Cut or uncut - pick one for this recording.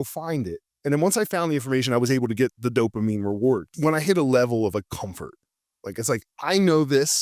cut